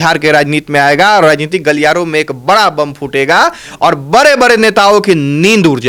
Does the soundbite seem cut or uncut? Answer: uncut